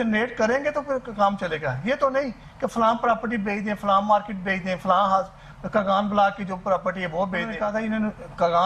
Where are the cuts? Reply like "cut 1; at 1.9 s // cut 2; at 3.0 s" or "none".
cut 1; at 7.5 s